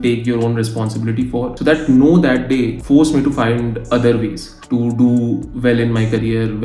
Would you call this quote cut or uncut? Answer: uncut